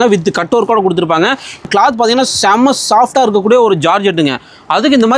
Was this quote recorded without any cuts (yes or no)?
no